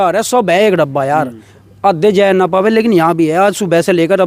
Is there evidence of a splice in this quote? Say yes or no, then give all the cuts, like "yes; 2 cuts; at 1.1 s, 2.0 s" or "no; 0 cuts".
no; 0 cuts